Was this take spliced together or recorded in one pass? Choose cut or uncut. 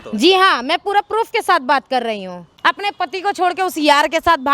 cut